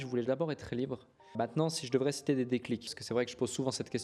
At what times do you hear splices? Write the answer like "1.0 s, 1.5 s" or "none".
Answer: 1.3 s, 2.9 s